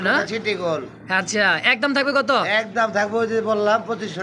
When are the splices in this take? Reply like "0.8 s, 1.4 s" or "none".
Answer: none